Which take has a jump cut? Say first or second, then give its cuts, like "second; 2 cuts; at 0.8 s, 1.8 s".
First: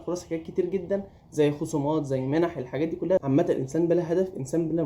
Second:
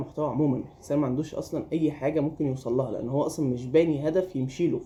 first; 1 cut; at 3.2 s